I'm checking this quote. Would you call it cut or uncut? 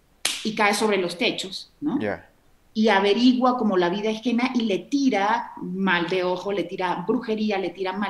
uncut